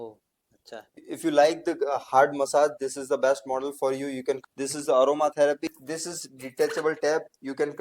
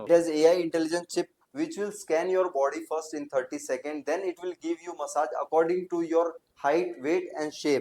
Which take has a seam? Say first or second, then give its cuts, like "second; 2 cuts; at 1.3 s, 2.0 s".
first; 3 cuts; at 1.0 s, 4.4 s, 5.6 s